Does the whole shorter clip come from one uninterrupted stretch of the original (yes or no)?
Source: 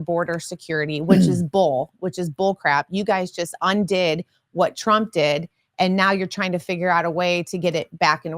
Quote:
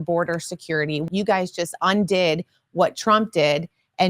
no